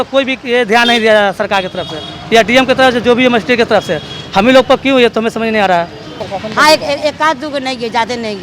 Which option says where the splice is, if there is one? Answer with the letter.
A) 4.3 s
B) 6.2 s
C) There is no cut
B